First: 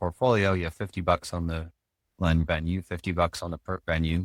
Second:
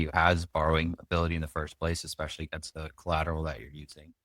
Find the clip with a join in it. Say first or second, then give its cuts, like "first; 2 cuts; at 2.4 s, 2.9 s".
second; 1 cut; at 2.7 s